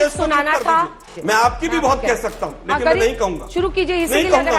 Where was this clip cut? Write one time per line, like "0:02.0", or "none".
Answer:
0:01.0